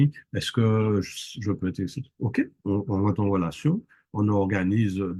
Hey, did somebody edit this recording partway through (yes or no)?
no